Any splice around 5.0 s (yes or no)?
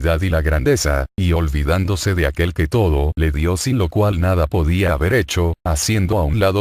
no